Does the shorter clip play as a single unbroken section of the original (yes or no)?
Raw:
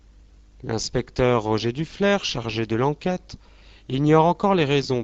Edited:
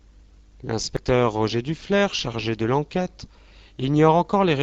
no